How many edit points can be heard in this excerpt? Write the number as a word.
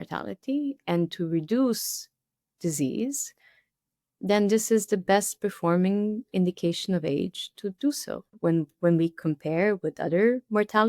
one